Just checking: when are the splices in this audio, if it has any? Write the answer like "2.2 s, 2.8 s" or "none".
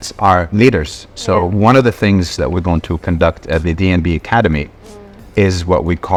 none